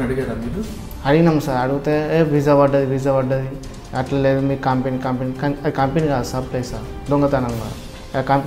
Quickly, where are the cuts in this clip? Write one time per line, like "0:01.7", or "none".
none